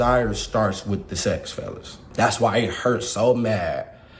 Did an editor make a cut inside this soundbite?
yes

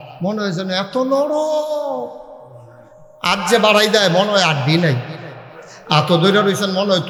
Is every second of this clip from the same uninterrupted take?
yes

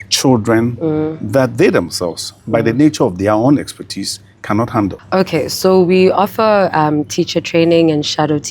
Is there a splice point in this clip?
yes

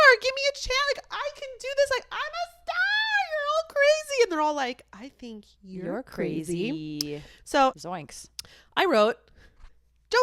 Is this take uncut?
no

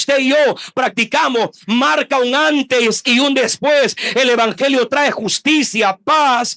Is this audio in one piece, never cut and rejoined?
yes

